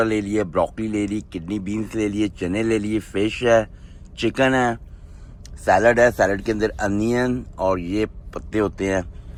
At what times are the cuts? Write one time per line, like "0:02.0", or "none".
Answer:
none